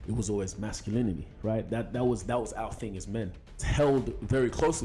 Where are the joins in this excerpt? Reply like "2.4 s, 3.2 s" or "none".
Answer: 3.7 s